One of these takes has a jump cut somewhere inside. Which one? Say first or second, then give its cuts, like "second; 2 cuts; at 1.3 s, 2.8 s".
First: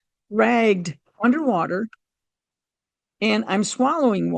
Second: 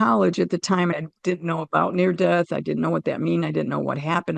second; 1 cut; at 0.9 s